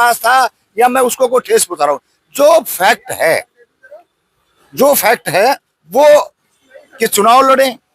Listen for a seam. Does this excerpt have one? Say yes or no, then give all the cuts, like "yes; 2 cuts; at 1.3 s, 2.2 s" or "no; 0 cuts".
yes; 1 cut; at 6.4 s